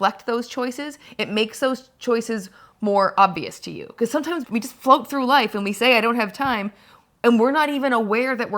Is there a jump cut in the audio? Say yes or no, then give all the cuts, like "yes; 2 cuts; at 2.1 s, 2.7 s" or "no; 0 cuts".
yes; 1 cut; at 4.4 s